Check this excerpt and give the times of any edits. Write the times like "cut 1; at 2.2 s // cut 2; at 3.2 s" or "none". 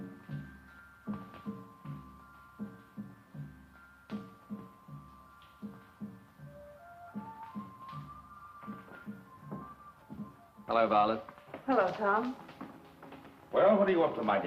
none